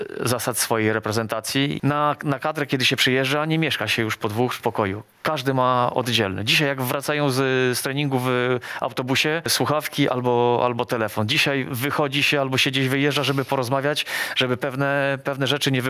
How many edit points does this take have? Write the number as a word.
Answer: three